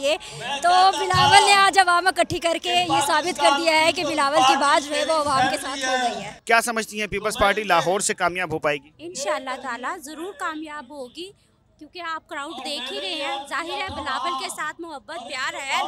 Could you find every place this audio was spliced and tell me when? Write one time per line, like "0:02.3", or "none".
none